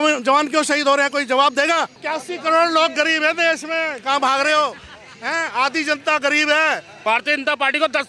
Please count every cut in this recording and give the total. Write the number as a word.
two